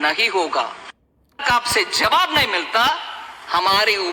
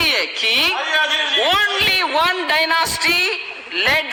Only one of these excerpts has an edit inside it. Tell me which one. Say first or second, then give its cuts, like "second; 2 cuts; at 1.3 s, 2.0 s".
first; 1 cut; at 1.4 s